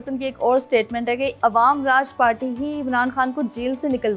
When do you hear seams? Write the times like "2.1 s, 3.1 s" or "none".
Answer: 1.3 s